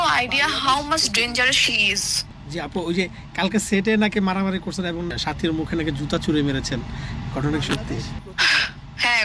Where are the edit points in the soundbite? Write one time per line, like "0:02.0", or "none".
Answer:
0:02.2